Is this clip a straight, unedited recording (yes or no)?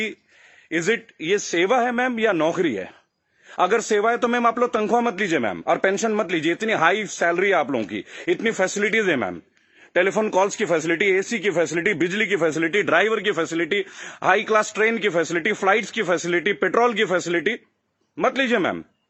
yes